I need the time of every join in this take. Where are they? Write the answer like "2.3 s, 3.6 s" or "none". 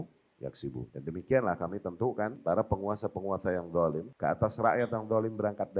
0.9 s, 2.4 s, 4.1 s

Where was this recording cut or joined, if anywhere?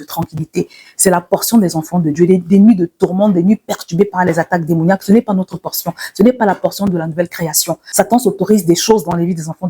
7.8 s

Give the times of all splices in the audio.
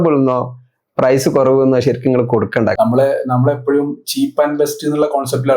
2.7 s

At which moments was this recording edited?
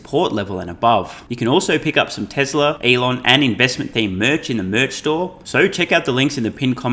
1.2 s, 2.8 s, 5.4 s

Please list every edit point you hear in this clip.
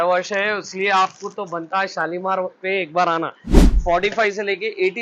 3.7 s

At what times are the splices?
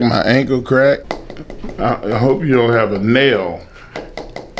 1.1 s

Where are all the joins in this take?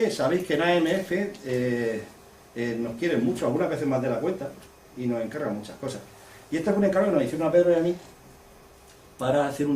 4.9 s

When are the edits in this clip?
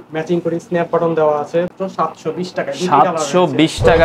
1.8 s

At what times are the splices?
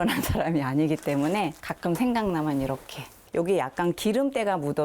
1.7 s, 3.2 s

